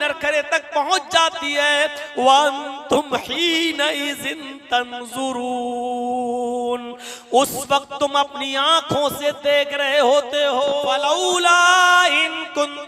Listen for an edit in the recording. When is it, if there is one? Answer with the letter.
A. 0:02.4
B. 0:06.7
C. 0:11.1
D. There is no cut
C